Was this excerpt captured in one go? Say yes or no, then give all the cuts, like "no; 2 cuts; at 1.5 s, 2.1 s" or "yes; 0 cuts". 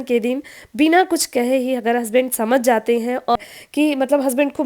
no; 1 cut; at 3.4 s